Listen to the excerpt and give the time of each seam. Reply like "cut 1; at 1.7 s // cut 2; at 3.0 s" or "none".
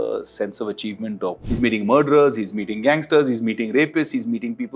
cut 1; at 1.4 s